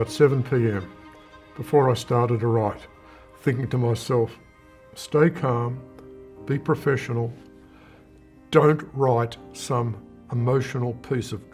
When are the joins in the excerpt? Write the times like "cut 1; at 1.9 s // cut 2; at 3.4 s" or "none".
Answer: none